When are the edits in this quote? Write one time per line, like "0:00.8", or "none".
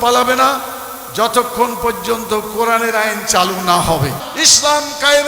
0:04.1